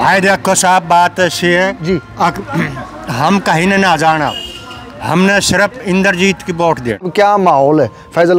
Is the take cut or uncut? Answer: cut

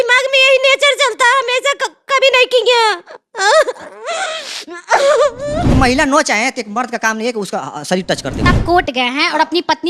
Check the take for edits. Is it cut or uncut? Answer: cut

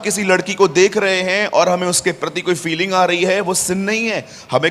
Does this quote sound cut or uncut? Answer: uncut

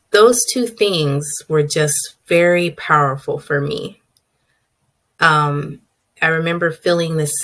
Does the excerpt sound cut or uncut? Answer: uncut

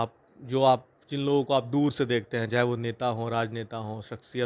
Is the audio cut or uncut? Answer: uncut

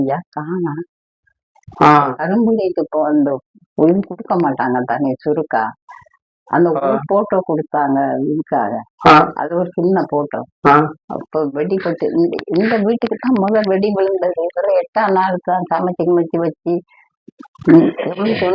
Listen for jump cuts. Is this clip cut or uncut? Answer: uncut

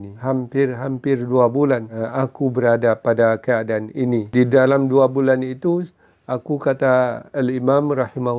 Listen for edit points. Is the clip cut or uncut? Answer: cut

